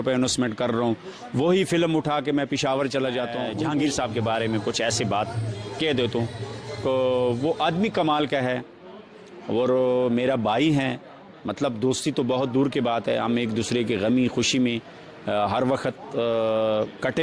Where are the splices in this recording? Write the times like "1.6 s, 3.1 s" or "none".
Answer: 3.5 s